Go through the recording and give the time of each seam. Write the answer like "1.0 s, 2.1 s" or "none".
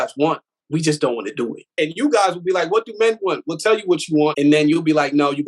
1.7 s, 4.4 s

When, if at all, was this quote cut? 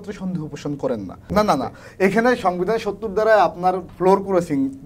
1.2 s

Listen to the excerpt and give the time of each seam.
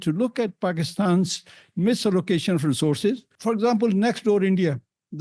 3.3 s

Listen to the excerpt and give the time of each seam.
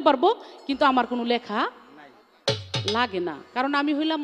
none

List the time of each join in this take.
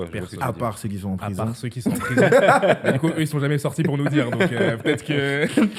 none

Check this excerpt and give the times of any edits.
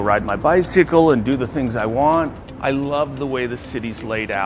2.4 s

